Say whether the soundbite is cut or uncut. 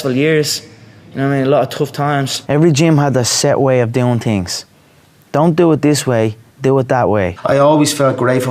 cut